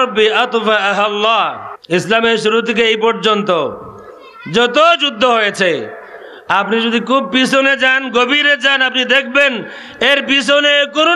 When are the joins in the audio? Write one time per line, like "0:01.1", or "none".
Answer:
0:01.7